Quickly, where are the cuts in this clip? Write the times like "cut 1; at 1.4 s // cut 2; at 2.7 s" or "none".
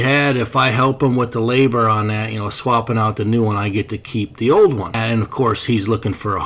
cut 1; at 5.0 s